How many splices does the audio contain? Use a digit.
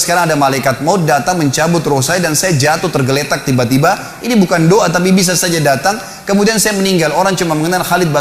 0